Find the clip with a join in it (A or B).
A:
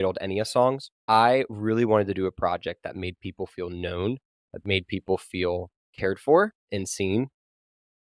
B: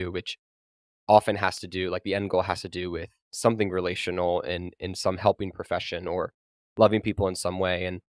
A